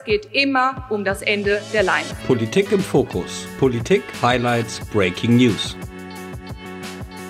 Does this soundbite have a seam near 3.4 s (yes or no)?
no